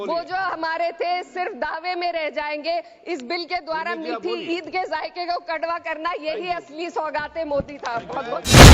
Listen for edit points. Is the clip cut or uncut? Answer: uncut